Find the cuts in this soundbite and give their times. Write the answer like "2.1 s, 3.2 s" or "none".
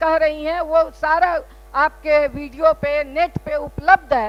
none